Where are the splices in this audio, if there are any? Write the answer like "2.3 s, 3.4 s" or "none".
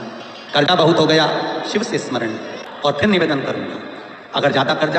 2.6 s